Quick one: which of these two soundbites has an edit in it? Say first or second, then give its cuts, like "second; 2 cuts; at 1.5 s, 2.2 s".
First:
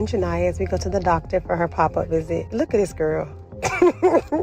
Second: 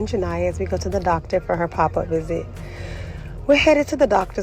first; 1 cut; at 2.5 s